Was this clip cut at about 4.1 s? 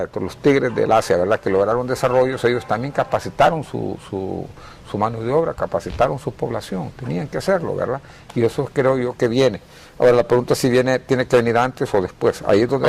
no; 1 cut; at 9.8 s

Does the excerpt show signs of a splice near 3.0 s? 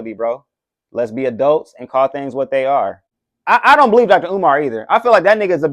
yes; 1 cut; at 3.0 s

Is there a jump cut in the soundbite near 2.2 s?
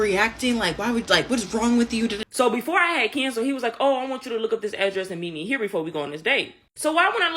yes; 1 cut; at 2.2 s

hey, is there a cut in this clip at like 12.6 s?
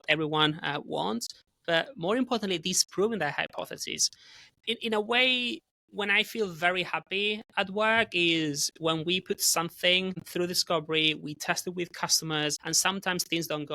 yes; 2 cuts; at 10.2 s, 12.6 s

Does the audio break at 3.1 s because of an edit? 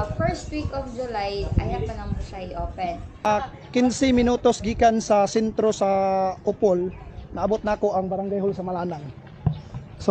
yes; 1 cut; at 3.1 s

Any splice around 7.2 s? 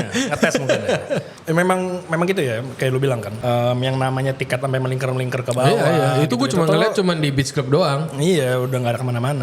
no; 2 cuts; at 1.3 s, 3.3 s

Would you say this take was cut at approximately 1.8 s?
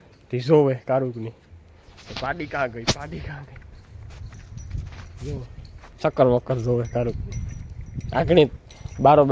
no; 0 cuts

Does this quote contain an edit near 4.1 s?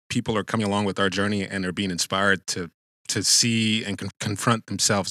yes; 1 cut; at 4.1 s

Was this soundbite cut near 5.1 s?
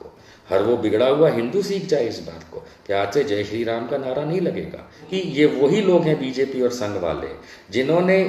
yes; 1 cut; at 5.1 s

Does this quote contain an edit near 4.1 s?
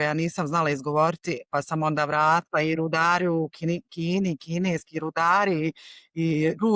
no; 0 cuts

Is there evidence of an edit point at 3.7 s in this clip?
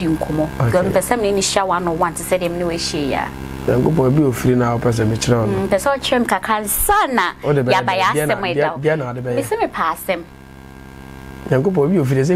yes; 1 cut; at 3.7 s

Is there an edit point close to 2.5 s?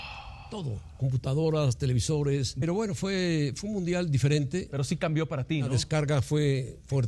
yes; 1 cut; at 2.5 s

